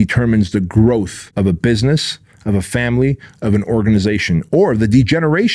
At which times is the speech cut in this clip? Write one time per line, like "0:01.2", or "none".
0:01.2